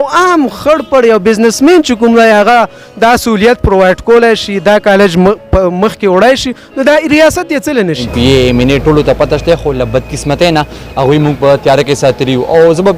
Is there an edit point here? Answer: yes; 1 cut; at 8.1 s

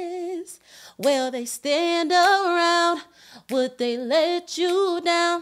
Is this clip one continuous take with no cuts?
yes; 0 cuts

